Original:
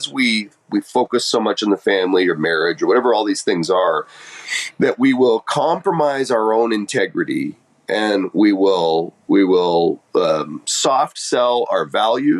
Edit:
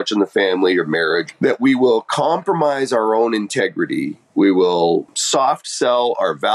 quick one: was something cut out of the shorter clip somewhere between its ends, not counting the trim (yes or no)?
yes